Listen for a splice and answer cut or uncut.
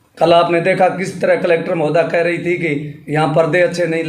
uncut